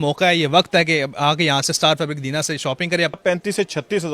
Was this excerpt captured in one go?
no; 1 cut; at 3.2 s

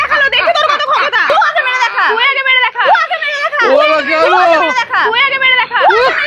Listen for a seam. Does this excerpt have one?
no; 0 cuts

